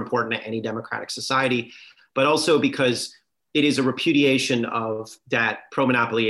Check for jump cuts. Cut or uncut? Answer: uncut